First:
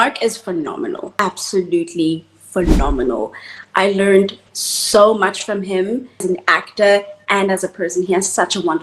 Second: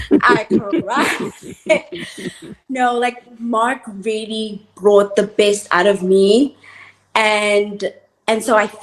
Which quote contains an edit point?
first; 2 cuts; at 1.2 s, 6.1 s

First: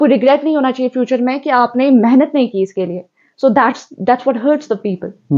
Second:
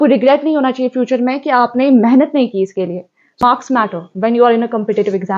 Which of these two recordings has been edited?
second; 1 cut; at 3.3 s

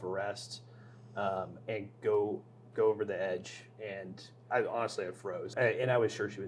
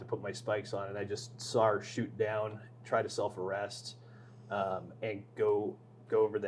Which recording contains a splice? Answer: first; 1 cut; at 5.5 s

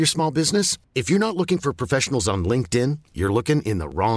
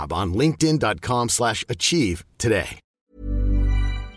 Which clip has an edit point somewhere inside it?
second; 1 cut; at 2.8 s

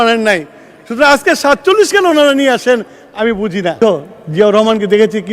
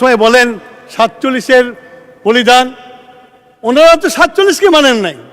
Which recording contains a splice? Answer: first; 1 cut; at 3.8 s

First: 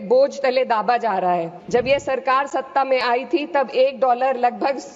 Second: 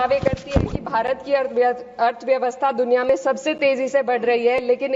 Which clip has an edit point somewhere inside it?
first; 1 cut; at 1.6 s

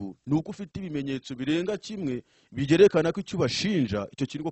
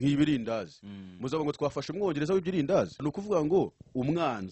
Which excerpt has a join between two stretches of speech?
second; 1 cut; at 3.0 s

